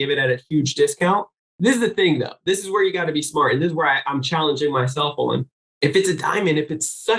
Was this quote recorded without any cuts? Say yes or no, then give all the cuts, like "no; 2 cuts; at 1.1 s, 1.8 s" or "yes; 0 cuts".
no; 2 cuts; at 1.4 s, 5.6 s